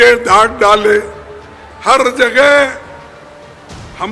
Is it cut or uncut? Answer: uncut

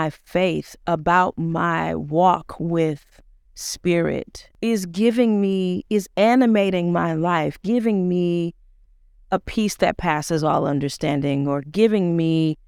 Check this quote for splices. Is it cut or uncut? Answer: cut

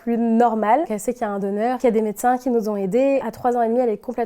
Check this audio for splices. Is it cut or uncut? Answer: cut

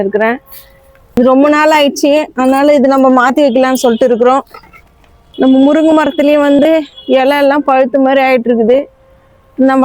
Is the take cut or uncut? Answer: uncut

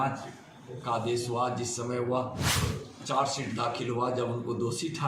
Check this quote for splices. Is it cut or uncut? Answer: cut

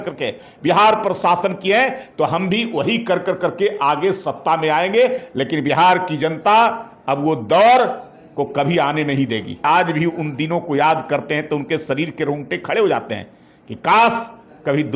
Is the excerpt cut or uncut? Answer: cut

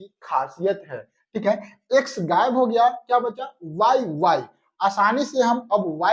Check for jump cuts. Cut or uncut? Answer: uncut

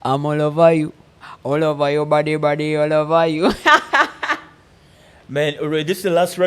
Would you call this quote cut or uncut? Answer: cut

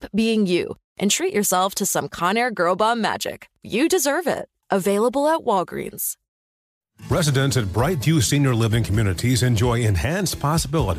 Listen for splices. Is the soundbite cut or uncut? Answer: cut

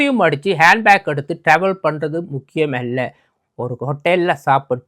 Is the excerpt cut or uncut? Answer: uncut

